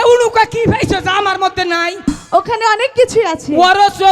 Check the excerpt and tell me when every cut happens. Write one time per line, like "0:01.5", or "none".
0:02.1